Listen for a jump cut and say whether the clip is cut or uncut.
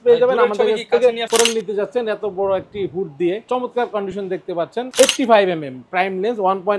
cut